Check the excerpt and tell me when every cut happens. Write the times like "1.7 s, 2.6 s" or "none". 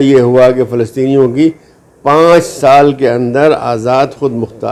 none